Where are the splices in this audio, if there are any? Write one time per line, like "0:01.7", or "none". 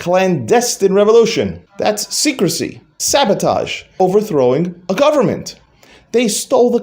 0:01.6
0:02.9
0:04.0